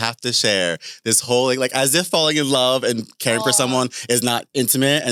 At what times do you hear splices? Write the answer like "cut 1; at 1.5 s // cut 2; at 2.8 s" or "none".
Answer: none